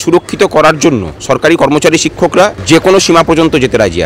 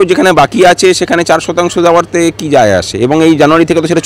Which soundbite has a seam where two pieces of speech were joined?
first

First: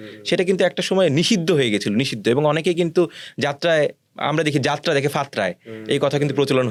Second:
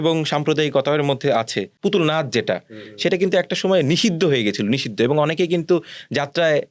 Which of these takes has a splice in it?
second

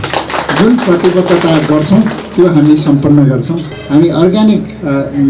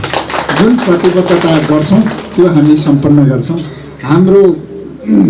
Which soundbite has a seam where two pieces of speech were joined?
first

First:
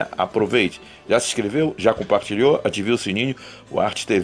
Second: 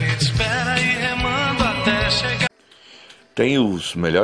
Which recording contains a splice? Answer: second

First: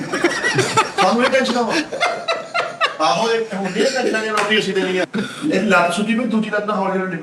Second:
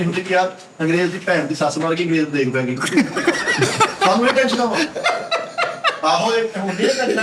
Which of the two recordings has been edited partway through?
first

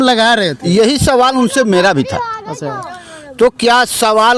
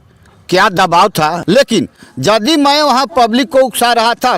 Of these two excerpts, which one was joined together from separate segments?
second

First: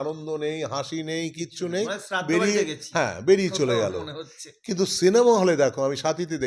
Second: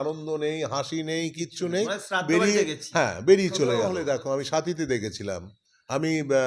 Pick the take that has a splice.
second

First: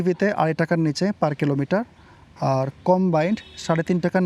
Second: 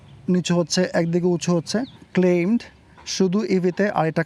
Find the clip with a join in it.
second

